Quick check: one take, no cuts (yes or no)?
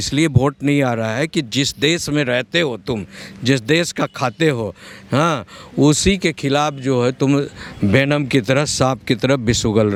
yes